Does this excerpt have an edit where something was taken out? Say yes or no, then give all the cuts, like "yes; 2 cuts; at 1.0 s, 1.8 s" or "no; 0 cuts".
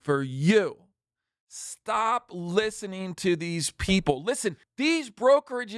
yes; 1 cut; at 4.7 s